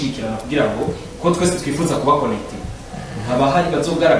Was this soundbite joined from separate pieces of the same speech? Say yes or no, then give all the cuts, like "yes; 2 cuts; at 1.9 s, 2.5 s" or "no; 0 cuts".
no; 0 cuts